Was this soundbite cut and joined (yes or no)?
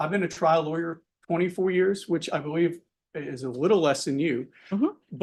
no